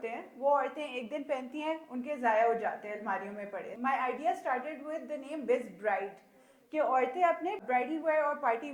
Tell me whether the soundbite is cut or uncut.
cut